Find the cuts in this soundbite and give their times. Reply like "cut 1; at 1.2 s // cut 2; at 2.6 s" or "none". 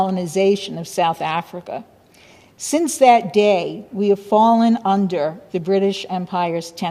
none